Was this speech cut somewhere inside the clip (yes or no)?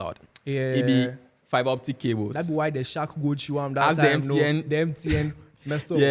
no